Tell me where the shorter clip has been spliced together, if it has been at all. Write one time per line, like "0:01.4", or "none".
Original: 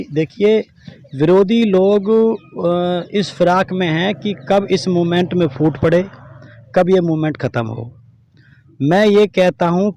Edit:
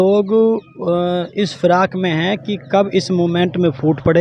none